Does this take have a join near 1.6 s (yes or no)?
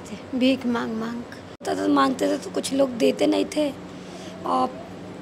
yes